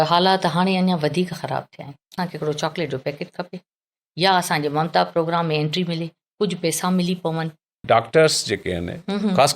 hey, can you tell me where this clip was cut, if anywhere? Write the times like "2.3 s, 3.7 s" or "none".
2.2 s, 7.8 s